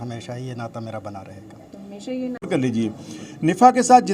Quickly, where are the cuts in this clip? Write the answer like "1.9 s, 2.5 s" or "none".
2.5 s